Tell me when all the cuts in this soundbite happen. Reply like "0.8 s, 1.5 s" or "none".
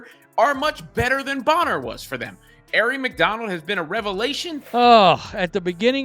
4.6 s